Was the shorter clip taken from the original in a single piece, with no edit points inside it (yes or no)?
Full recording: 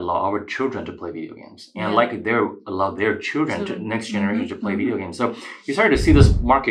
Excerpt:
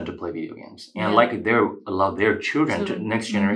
yes